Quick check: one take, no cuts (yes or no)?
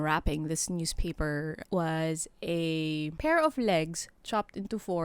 no